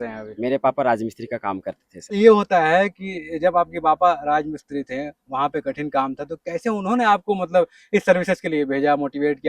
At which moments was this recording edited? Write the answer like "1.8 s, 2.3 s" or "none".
2.2 s